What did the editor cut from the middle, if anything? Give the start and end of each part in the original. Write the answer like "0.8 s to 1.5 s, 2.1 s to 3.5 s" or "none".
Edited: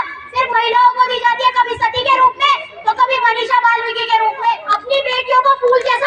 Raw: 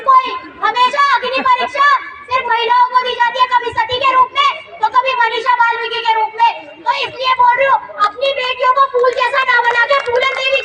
6.7 s to 8.0 s